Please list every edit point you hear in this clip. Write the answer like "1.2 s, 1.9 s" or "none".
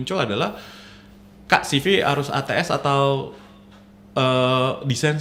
none